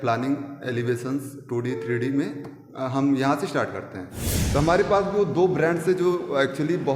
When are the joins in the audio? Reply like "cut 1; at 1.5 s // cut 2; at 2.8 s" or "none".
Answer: cut 1; at 4.3 s